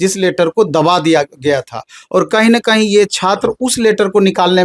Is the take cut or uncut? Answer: uncut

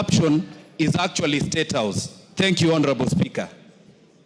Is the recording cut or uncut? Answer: uncut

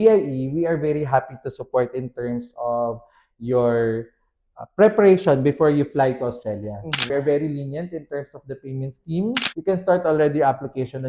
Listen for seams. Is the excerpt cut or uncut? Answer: cut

